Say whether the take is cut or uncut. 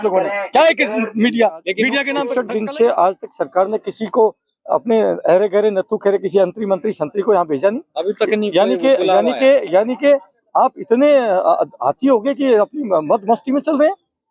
cut